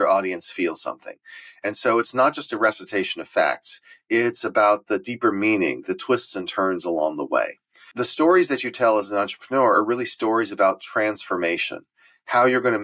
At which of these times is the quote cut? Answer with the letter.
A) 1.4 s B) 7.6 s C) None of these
B